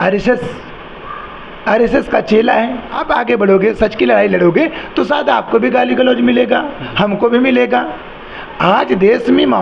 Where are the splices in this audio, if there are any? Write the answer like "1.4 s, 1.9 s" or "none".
3.0 s